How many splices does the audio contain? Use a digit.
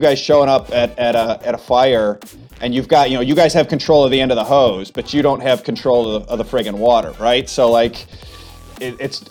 2